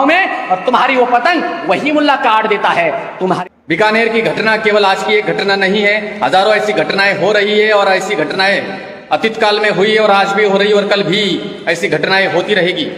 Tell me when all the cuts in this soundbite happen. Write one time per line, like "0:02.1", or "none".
0:03.4